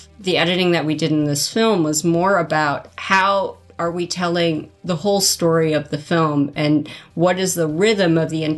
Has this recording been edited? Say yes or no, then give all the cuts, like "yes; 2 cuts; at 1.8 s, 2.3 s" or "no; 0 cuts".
no; 0 cuts